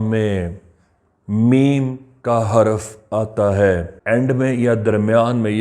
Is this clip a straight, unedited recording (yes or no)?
no